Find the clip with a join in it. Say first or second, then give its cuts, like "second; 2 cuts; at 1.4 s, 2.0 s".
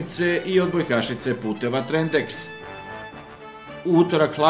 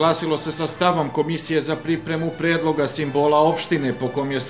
first; 2 cuts; at 2.4 s, 3.8 s